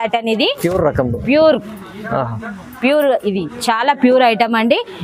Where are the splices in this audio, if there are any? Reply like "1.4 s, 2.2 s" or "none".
none